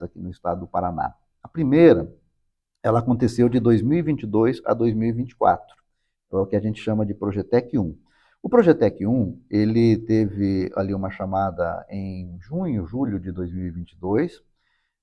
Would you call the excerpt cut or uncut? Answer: uncut